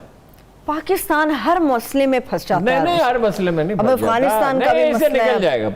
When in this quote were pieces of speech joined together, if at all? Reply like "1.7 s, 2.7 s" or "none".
none